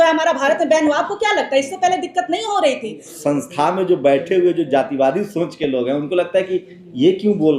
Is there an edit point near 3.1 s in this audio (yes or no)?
yes